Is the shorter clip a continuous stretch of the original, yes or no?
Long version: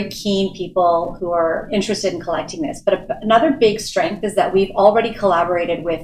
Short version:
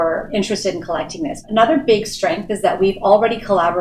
no